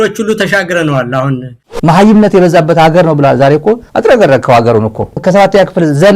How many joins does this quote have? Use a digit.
2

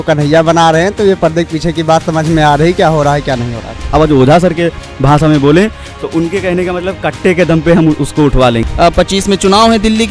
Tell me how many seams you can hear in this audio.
2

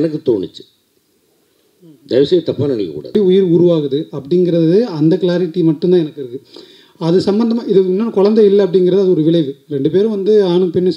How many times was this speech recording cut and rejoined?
1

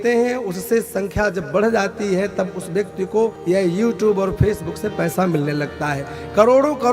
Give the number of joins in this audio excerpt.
1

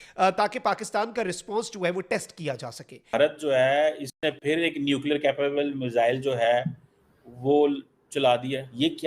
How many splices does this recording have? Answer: 1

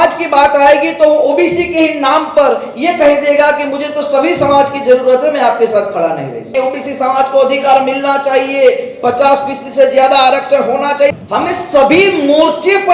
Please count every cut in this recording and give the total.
2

